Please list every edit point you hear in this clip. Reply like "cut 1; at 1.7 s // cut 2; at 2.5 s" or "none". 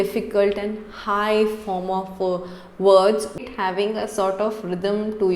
cut 1; at 3.3 s